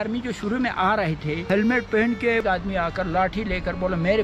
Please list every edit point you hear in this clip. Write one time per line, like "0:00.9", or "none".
0:01.4
0:02.4